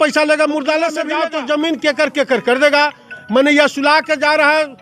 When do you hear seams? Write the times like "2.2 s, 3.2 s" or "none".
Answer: 1.1 s